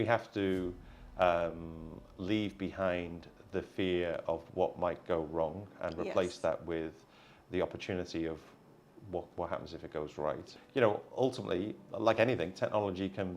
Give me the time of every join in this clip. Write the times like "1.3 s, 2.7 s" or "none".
10.5 s